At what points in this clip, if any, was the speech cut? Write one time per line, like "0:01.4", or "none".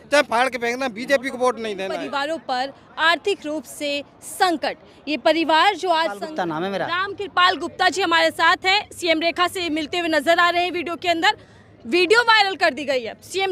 0:02.0
0:06.2